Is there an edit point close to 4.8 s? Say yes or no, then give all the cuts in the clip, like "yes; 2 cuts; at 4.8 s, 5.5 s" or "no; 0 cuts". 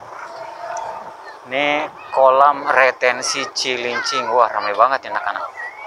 no; 1 cut; at 1.1 s